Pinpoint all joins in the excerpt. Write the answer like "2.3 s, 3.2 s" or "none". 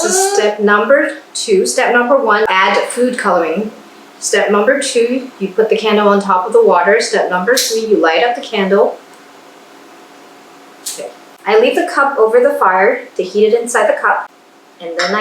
11.3 s, 14.2 s